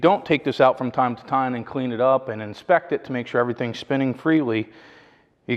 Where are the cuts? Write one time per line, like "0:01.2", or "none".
none